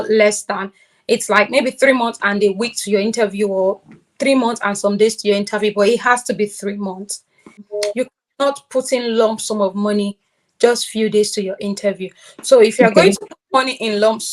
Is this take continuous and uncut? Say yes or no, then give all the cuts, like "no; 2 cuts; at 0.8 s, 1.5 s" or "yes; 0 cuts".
no; 1 cut; at 7.5 s